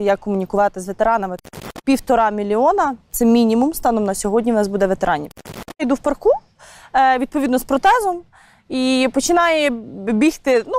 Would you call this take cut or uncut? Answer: cut